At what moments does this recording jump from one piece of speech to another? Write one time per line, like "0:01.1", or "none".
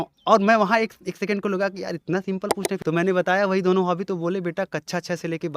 0:02.7